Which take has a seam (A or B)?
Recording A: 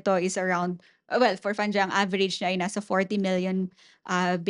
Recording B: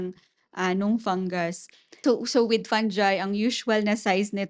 B